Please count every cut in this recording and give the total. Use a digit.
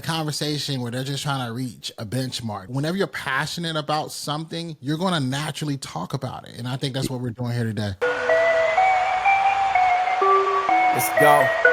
2